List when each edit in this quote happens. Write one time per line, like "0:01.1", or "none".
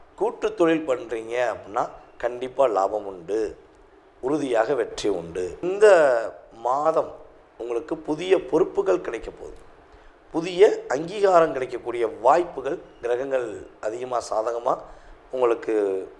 0:05.6